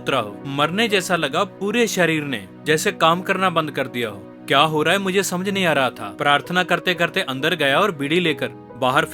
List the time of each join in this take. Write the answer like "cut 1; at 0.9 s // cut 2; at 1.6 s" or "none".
none